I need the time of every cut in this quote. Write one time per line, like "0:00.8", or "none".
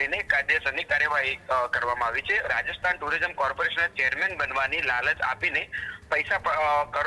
0:02.5